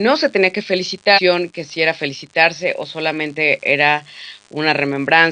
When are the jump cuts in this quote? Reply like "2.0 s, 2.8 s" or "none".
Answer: none

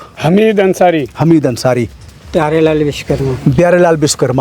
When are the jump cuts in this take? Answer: none

